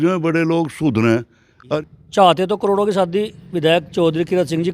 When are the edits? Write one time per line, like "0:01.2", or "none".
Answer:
0:01.7

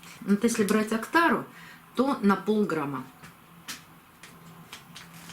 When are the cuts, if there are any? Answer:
0:04.2

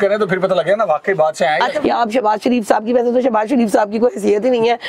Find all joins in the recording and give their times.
0:01.8

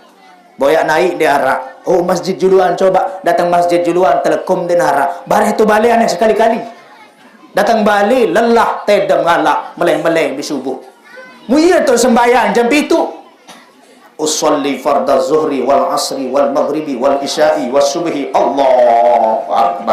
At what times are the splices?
none

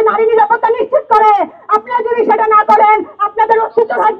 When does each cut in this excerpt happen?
none

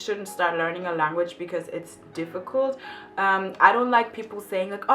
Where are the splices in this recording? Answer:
none

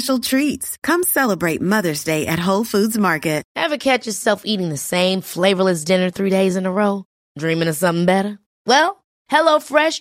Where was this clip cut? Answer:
0:03.5

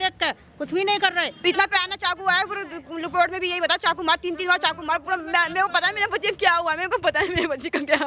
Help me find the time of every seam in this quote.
0:01.3

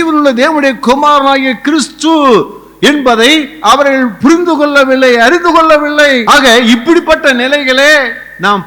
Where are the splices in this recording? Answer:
0:06.2

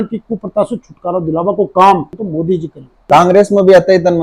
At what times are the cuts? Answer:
0:02.4

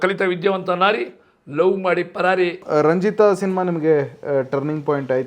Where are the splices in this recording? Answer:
0:02.6

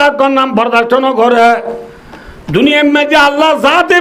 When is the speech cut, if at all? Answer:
none

